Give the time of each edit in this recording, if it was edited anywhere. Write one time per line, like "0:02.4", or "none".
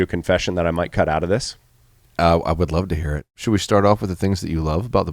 0:03.3